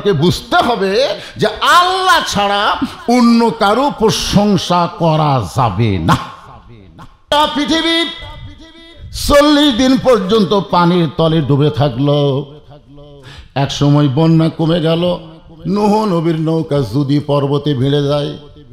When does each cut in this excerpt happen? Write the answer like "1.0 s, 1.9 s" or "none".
7.3 s